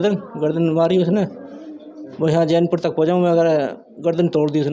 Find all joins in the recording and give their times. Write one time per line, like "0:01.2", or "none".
none